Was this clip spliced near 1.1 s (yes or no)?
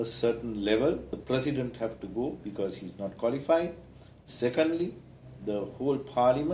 yes